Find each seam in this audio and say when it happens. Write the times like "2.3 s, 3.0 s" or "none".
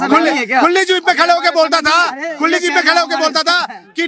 none